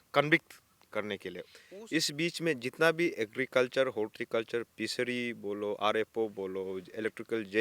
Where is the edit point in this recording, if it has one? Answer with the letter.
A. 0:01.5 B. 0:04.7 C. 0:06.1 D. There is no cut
A